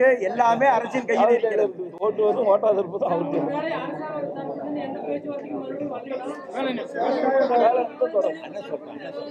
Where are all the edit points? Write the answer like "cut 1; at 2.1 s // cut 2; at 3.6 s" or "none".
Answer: none